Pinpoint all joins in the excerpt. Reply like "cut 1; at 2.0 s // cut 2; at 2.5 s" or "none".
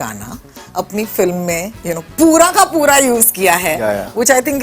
none